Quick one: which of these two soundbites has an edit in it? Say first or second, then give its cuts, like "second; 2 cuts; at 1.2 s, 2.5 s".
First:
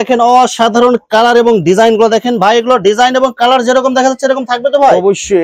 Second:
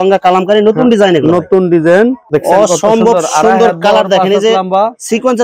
second; 1 cut; at 2.2 s